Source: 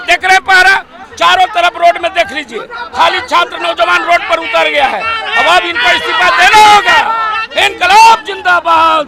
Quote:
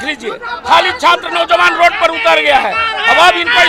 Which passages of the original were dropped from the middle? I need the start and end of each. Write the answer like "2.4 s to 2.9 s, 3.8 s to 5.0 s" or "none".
none